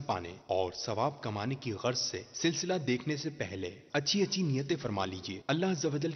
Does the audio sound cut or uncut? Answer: cut